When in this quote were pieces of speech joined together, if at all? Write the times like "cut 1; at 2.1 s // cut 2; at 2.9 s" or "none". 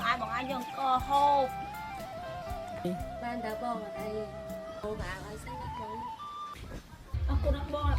cut 1; at 6.5 s